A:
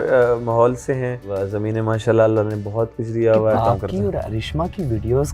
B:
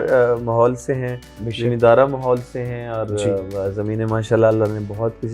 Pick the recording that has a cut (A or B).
A